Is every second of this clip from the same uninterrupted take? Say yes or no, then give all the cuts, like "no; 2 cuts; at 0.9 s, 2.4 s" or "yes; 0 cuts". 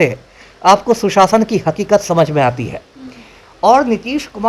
yes; 0 cuts